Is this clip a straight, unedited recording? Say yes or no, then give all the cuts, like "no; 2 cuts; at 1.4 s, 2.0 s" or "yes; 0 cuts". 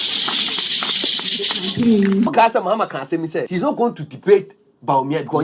no; 2 cuts; at 2.3 s, 3.5 s